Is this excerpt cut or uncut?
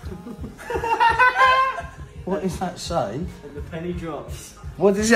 uncut